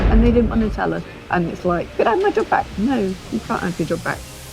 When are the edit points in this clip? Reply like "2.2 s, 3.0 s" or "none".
1.1 s, 1.9 s

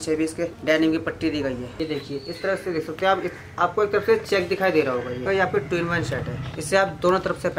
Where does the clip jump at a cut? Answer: 1.7 s, 5.3 s, 6.5 s

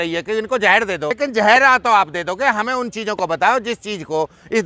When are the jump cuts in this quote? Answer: 1.2 s

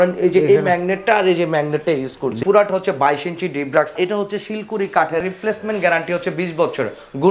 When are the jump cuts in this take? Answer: 2.4 s, 3.9 s, 5.2 s

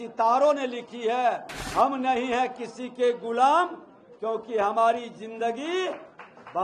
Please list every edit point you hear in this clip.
1.5 s

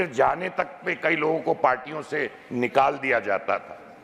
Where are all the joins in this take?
none

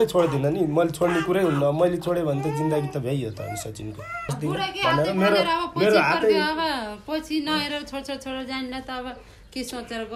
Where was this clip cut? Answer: 4.4 s

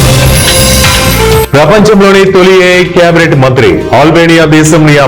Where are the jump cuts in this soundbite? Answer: 1.5 s

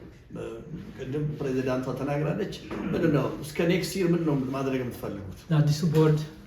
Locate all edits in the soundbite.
5.5 s

